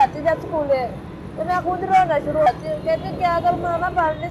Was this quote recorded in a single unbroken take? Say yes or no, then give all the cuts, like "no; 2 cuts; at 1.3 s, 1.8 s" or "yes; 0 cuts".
yes; 0 cuts